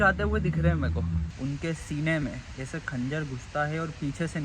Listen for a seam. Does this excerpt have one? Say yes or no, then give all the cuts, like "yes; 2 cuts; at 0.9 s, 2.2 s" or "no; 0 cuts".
yes; 1 cut; at 1.3 s